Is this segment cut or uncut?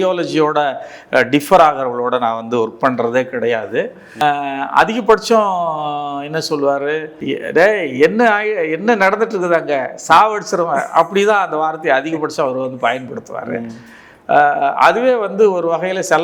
cut